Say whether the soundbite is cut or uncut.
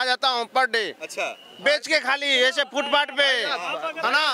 uncut